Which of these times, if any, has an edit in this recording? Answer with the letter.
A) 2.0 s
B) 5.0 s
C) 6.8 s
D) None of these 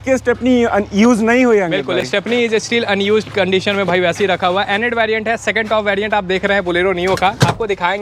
D